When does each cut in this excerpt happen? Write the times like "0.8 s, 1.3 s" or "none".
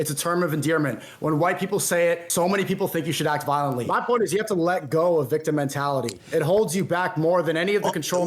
2.3 s, 3.8 s